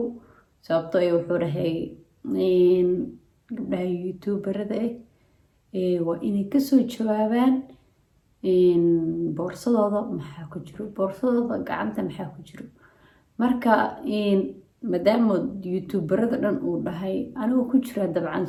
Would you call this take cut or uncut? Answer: uncut